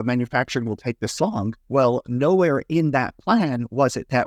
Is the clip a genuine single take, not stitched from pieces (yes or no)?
no